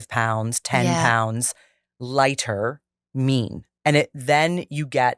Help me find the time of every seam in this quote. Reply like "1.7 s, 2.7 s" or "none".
3.7 s